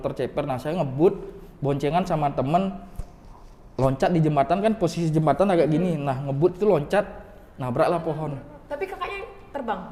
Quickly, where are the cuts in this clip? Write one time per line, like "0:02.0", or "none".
none